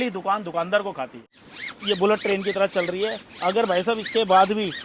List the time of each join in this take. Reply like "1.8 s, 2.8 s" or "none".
1.2 s